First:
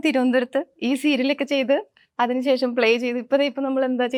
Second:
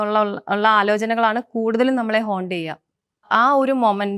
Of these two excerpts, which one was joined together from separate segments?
second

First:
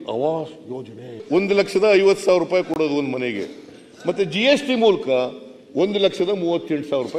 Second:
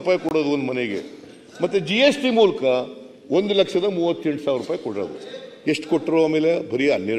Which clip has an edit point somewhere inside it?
first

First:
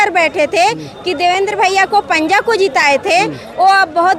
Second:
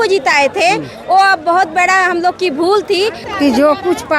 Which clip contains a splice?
second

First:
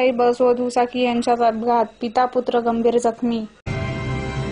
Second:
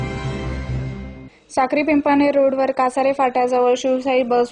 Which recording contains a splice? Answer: second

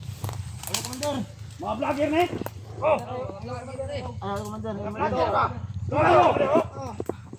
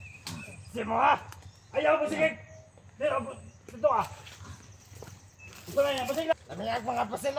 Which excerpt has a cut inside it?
second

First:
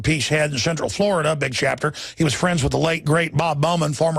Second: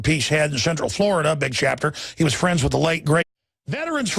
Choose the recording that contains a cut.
first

